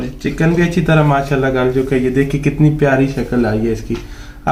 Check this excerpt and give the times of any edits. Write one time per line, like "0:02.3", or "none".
none